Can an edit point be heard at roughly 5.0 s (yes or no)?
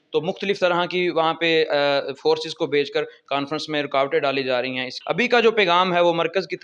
yes